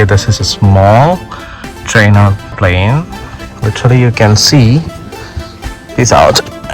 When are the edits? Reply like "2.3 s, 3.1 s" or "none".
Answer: 2.5 s